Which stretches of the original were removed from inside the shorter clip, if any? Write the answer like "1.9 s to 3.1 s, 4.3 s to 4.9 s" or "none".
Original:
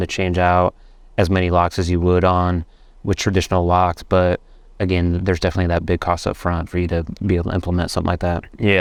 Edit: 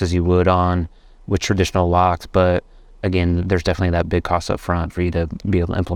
none